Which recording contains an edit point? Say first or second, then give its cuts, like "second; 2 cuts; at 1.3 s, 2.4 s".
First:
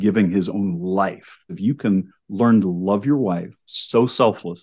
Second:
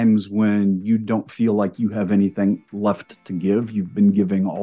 first; 1 cut; at 1.5 s